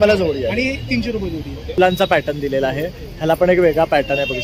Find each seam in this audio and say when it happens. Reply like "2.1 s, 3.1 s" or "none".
1.8 s